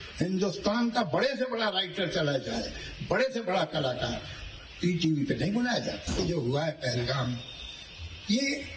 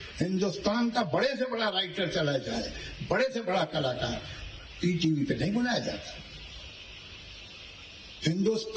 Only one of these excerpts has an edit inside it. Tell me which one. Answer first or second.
first